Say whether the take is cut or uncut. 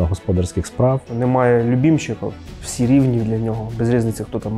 cut